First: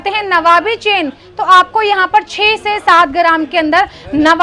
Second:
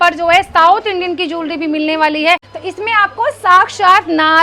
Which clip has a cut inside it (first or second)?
second